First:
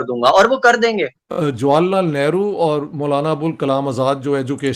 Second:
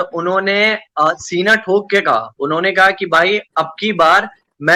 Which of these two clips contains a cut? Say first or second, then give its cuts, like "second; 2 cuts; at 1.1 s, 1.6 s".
first; 1 cut; at 1.2 s